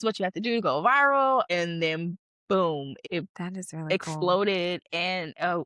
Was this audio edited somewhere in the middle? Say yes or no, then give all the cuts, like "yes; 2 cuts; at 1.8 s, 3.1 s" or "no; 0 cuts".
yes; 2 cuts; at 1.5 s, 2.9 s